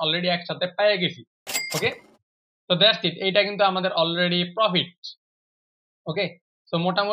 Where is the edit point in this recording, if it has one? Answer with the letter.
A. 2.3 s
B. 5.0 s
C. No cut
C